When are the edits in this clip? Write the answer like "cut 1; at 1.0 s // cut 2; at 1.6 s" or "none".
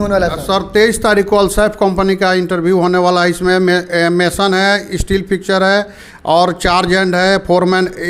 none

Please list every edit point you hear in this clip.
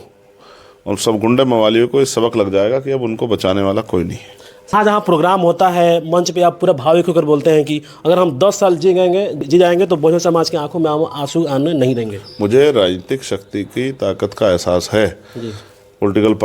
cut 1; at 4.7 s // cut 2; at 9.4 s

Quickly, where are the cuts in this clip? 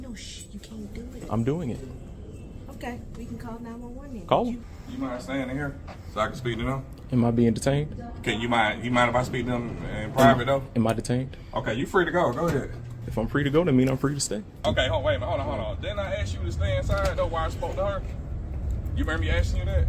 cut 1; at 1.2 s // cut 2; at 4.6 s // cut 3; at 13.0 s // cut 4; at 14.6 s

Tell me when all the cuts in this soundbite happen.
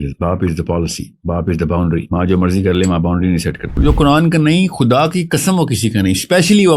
cut 1; at 3.8 s

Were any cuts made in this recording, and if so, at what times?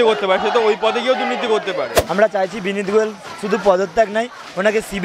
cut 1; at 2.0 s

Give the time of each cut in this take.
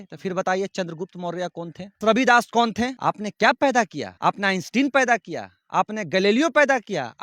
cut 1; at 2.0 s // cut 2; at 3.0 s // cut 3; at 4.0 s

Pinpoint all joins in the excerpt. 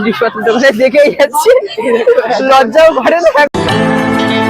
cut 1; at 3.5 s

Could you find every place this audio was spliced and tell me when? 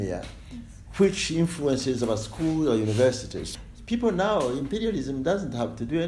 cut 1; at 3.4 s

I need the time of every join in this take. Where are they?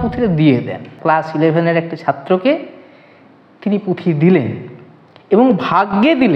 cut 1; at 0.9 s

